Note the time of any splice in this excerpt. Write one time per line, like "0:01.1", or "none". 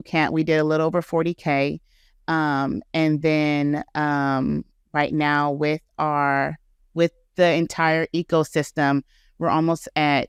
none